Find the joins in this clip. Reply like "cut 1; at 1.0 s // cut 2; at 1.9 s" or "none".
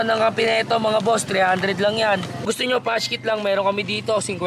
cut 1; at 2.4 s